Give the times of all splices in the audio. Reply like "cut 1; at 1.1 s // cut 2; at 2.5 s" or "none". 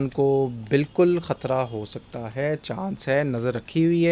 none